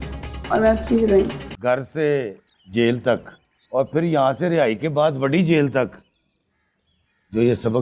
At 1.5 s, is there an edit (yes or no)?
yes